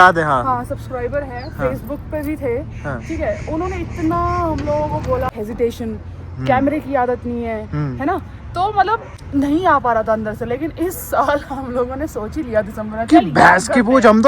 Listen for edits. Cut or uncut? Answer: cut